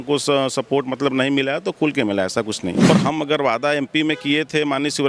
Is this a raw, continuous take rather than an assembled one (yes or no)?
no